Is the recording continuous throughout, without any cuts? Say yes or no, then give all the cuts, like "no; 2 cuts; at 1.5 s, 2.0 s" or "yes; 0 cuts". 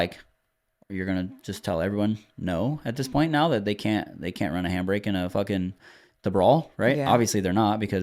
yes; 0 cuts